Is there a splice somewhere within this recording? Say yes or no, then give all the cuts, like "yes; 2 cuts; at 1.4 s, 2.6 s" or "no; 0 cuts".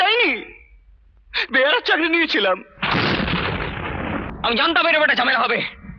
yes; 1 cut; at 4.3 s